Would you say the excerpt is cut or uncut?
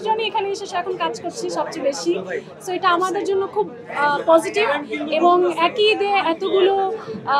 uncut